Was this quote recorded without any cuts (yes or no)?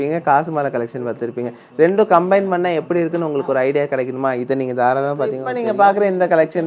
no